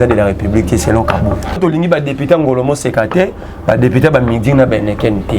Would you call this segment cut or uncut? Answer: cut